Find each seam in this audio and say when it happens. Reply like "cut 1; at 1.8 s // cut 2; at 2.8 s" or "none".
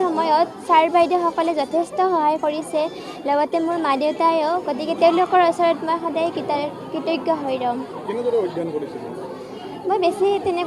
none